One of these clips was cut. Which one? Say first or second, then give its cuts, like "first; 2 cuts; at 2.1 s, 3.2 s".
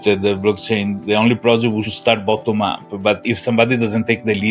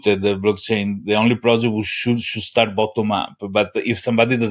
first; 2 cuts; at 1.9 s, 3.2 s